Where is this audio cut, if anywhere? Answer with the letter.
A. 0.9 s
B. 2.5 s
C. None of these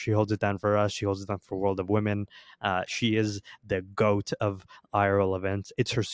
C